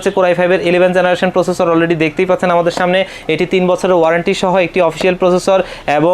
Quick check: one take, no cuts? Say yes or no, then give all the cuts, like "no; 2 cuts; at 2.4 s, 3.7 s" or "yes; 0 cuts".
yes; 0 cuts